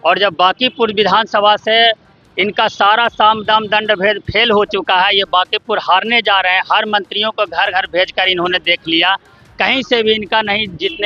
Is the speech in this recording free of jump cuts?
yes; 0 cuts

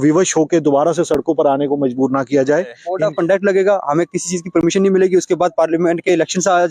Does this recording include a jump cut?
yes; 1 cut; at 2.8 s

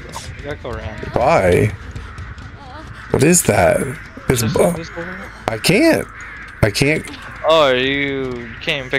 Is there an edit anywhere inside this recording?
no; 0 cuts

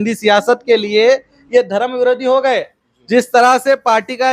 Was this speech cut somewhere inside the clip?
no; 0 cuts

